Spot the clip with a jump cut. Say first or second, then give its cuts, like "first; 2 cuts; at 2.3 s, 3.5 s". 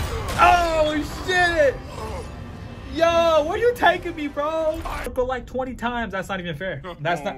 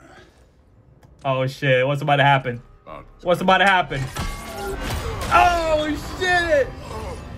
first; 1 cut; at 5.1 s